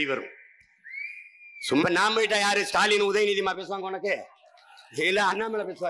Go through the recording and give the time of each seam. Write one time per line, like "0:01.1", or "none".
0:01.8